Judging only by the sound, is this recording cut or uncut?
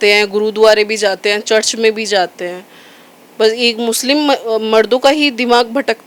uncut